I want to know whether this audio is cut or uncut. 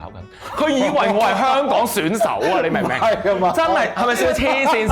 uncut